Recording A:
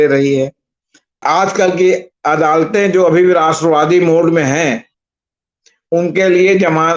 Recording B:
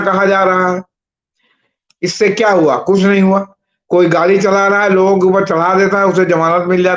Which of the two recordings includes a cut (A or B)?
A